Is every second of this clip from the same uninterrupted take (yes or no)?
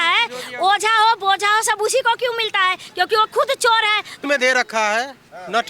no